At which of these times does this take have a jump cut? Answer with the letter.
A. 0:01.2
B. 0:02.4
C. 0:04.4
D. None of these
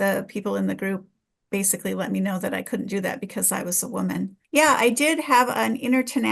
C